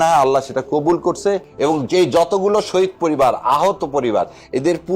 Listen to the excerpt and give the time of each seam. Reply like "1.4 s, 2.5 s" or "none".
1.5 s